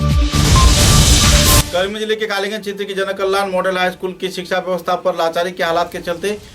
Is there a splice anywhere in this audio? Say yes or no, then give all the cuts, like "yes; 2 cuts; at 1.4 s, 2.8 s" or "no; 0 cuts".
yes; 1 cut; at 1.4 s